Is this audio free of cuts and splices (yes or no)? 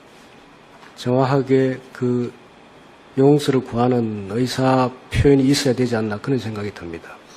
no